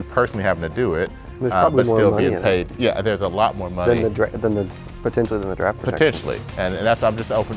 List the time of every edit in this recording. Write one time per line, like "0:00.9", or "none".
none